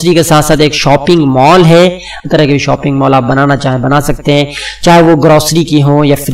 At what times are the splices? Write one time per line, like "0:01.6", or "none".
0:02.2